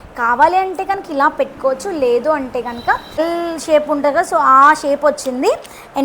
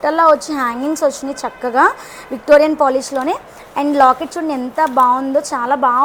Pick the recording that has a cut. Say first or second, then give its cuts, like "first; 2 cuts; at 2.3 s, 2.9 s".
first; 1 cut; at 3.2 s